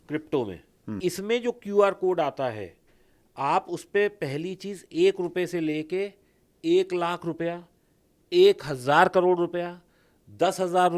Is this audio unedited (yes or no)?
no